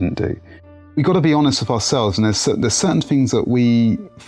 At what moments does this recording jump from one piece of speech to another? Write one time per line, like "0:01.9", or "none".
0:01.0